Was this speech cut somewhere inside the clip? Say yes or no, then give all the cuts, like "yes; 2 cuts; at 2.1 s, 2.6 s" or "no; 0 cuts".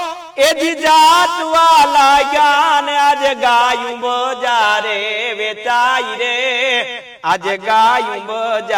no; 0 cuts